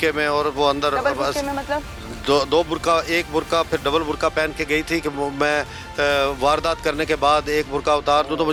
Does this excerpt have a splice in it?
no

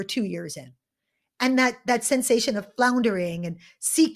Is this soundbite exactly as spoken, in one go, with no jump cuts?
yes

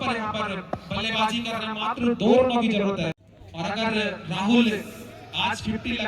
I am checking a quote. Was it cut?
yes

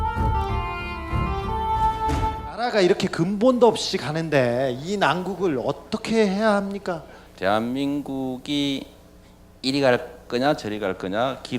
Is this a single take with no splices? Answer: no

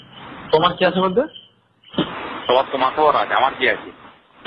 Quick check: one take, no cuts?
no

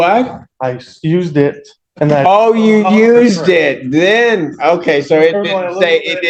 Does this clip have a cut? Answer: no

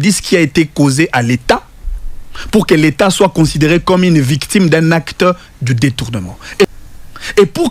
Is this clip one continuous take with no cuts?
no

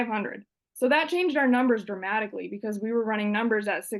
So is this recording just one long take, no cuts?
yes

